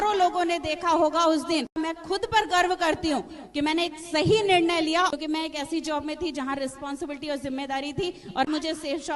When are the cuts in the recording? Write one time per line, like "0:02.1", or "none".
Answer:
0:01.7
0:05.1
0:08.5